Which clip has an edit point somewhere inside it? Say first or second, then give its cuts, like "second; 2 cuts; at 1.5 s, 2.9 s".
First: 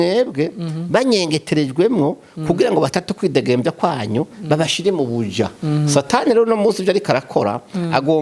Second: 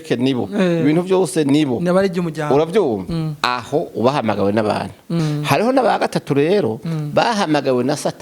second; 1 cut; at 5.2 s